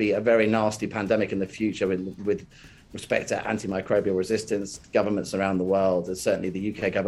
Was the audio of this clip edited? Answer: yes; 1 cut; at 4.8 s

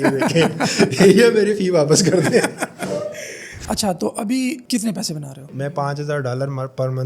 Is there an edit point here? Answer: yes; 2 cuts; at 3.5 s, 5.5 s

